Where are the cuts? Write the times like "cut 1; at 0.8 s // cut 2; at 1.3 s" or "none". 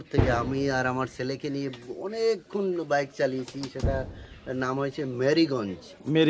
none